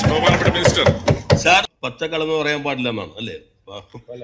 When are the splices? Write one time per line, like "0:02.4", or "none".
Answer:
0:01.8